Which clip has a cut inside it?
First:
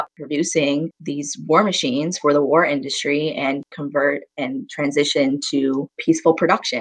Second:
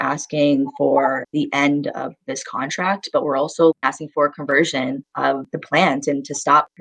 second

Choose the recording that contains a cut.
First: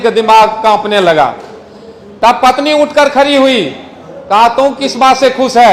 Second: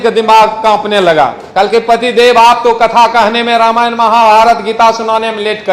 second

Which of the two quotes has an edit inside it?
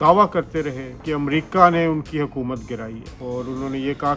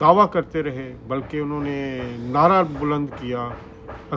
first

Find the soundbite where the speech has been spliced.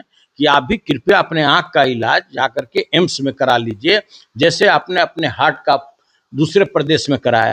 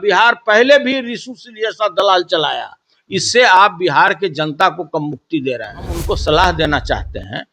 second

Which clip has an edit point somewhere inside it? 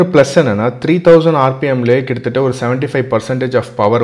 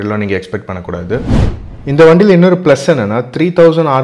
second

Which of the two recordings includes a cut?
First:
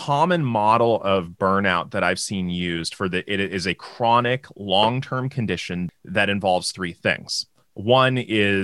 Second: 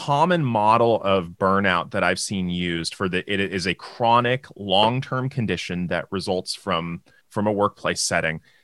first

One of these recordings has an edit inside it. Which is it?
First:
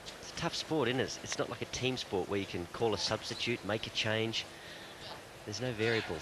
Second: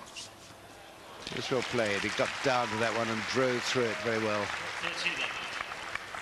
second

